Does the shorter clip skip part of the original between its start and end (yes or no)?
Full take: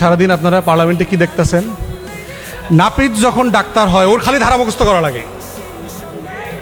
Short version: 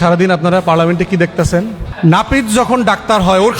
yes